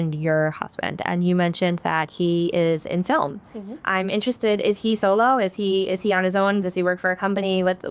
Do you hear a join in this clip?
no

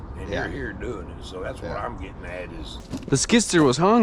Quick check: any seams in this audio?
yes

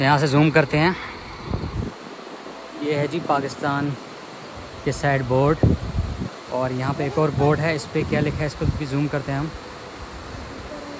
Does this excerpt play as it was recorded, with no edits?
yes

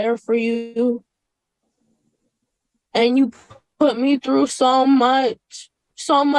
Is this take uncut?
yes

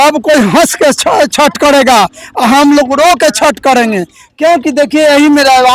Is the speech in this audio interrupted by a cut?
no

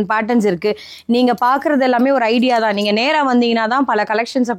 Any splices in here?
no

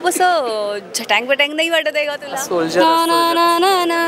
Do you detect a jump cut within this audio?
yes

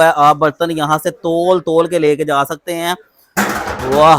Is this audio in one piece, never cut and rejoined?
yes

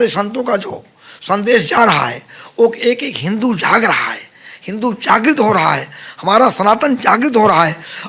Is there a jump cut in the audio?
no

